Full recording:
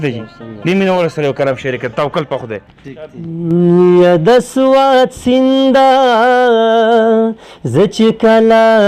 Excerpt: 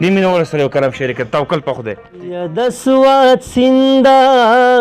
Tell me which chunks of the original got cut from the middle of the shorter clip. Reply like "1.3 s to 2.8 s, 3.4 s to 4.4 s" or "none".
3.2 s to 4.2 s